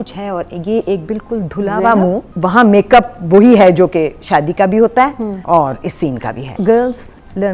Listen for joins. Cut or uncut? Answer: cut